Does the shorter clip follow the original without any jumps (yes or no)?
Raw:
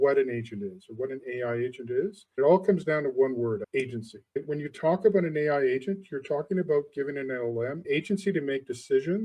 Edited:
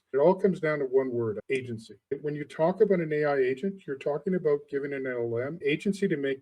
yes